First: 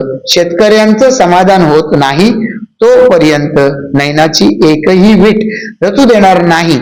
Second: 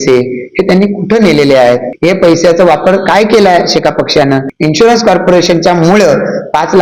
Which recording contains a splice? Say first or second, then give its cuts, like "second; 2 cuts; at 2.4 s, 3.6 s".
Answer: second; 2 cuts; at 1.9 s, 4.5 s